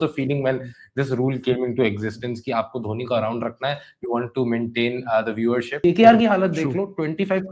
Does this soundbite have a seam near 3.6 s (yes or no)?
no